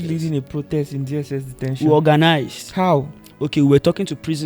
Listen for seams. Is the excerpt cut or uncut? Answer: uncut